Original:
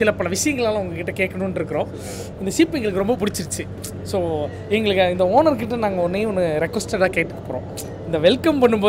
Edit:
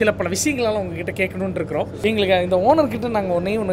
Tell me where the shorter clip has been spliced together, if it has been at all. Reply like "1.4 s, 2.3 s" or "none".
1.9 s